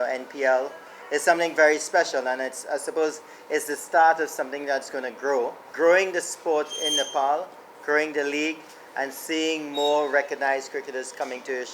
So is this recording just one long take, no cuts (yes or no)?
no